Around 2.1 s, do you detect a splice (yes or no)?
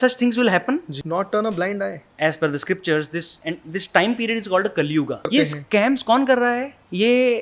yes